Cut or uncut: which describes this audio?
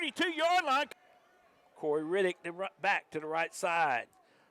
cut